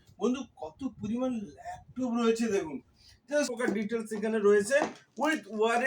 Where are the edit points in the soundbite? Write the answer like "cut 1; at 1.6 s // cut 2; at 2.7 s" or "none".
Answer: cut 1; at 3.5 s